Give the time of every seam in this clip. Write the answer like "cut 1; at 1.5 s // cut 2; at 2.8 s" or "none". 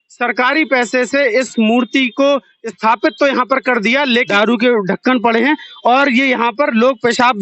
cut 1; at 4.3 s